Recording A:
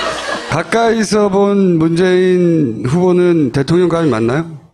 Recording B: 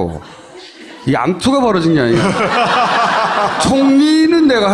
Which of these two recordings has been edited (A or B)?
A